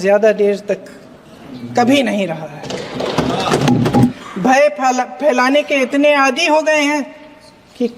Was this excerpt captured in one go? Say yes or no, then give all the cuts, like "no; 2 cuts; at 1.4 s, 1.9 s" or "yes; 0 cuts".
no; 1 cut; at 4.1 s